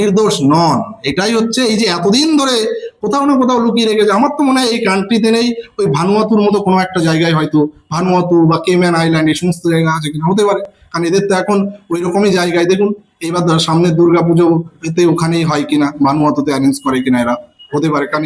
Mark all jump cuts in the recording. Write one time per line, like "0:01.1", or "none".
none